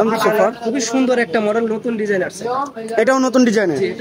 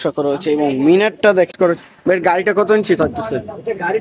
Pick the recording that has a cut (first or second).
second